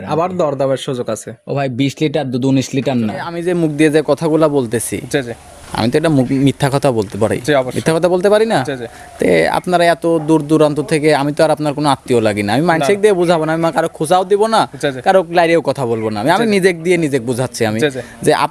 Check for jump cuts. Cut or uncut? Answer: cut